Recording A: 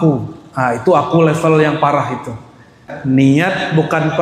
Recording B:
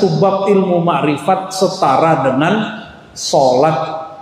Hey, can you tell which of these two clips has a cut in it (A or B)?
A